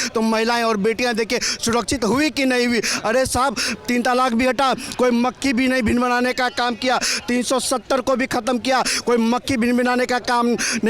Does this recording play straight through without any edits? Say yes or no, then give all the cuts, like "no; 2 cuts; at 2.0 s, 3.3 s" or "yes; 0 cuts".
yes; 0 cuts